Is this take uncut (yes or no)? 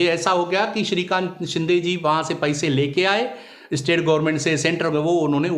yes